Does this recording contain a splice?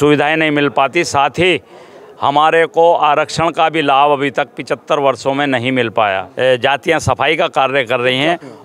yes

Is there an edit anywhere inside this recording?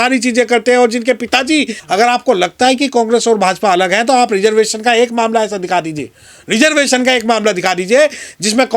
yes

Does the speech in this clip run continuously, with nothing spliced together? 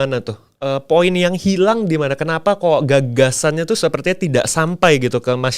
yes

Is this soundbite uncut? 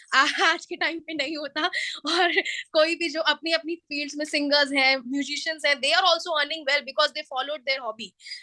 yes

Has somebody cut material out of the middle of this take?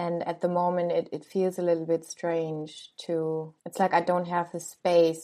no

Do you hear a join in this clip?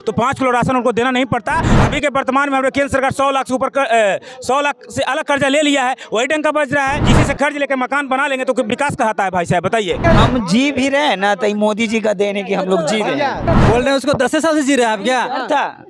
yes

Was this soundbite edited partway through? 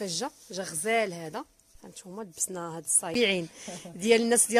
yes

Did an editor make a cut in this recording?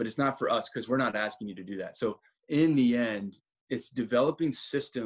yes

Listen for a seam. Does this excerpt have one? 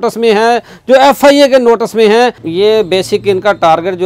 yes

